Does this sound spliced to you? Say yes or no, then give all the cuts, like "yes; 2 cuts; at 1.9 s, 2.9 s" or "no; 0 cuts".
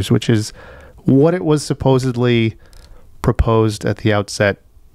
no; 0 cuts